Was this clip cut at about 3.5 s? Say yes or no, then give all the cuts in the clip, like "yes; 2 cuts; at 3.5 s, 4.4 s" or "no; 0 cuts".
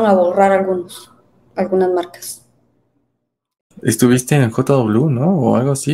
yes; 1 cut; at 3.5 s